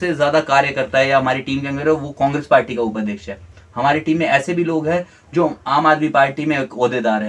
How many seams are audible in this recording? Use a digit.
0